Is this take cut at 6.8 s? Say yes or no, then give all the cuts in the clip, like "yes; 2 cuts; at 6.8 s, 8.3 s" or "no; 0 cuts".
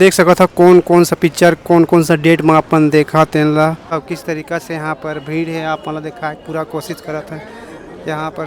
no; 1 cut; at 3.9 s